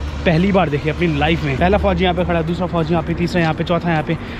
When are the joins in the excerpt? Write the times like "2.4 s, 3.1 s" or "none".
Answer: none